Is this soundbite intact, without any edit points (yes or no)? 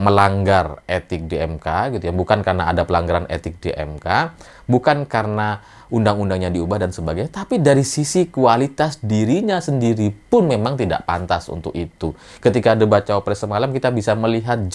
yes